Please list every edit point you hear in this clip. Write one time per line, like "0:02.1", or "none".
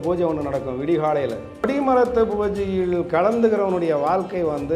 0:01.7